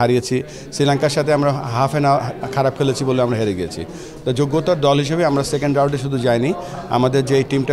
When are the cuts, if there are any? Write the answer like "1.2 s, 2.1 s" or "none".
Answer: none